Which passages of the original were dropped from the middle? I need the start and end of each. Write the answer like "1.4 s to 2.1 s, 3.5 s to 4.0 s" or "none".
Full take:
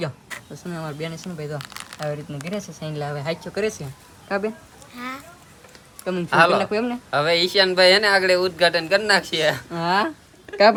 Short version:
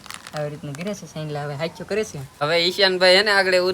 4.0 s to 7.1 s